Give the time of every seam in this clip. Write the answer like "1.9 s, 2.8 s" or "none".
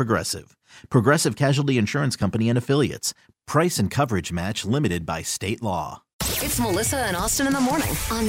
6.0 s